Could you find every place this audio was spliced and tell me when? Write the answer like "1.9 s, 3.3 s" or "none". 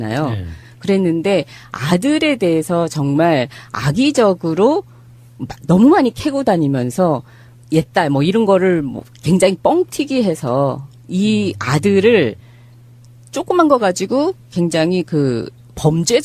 none